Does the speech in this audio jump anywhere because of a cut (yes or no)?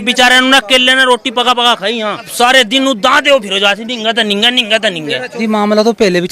yes